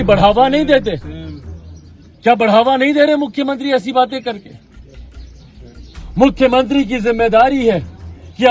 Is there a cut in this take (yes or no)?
no